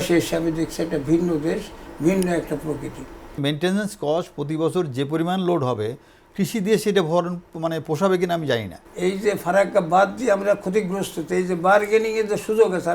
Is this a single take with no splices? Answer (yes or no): no